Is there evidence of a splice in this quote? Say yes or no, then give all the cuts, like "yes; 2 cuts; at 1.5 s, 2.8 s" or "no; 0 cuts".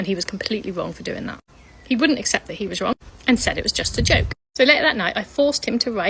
yes; 1 cut; at 4.4 s